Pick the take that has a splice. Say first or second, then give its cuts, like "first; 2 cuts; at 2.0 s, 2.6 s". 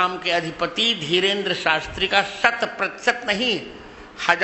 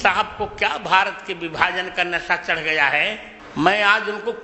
second; 1 cut; at 3.3 s